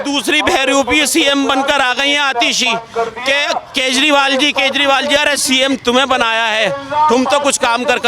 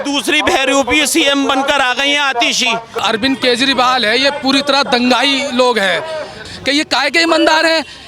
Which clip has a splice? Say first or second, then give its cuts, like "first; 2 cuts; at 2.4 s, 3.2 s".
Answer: second; 2 cuts; at 3.0 s, 6.4 s